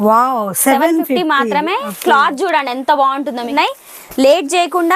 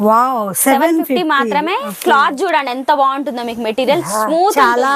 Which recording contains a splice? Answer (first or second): first